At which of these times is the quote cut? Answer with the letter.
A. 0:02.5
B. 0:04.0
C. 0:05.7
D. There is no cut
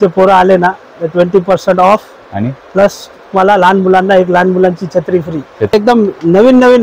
C